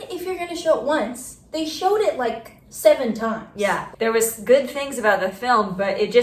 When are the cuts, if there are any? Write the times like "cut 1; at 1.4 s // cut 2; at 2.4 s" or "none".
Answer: cut 1; at 3.8 s